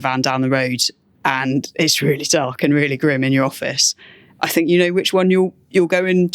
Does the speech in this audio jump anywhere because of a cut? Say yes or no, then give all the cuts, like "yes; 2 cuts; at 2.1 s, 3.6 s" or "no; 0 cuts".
no; 0 cuts